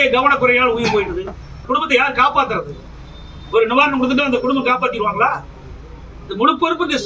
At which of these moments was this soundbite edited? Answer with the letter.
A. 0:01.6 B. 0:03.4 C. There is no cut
A